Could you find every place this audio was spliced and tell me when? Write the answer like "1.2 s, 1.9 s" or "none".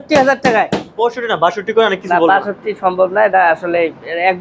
none